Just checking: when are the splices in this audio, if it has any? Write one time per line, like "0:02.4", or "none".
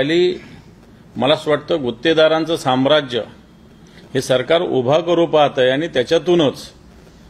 none